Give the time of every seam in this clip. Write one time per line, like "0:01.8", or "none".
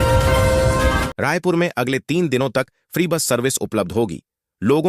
0:01.2

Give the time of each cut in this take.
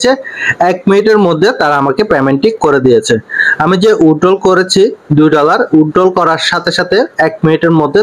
none

